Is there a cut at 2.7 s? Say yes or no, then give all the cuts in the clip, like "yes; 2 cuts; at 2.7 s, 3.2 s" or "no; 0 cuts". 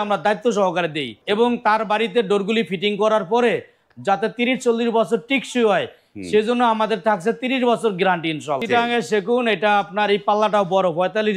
no; 2 cuts; at 1.1 s, 8.6 s